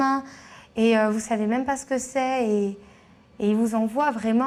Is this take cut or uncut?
uncut